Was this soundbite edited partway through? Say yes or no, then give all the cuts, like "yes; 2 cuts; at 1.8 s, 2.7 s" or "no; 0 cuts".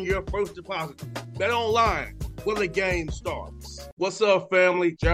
no; 0 cuts